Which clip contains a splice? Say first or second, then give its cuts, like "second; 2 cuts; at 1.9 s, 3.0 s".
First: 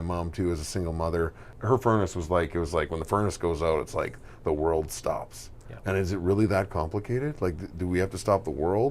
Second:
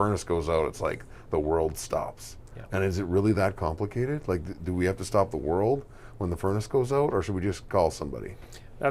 first; 1 cut; at 1.5 s